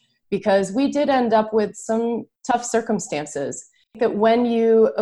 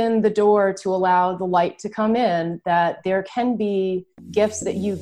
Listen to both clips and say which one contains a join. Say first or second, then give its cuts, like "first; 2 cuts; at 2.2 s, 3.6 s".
first; 2 cuts; at 2.3 s, 4.0 s